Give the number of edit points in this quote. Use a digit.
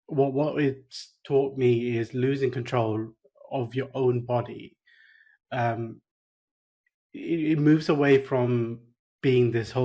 0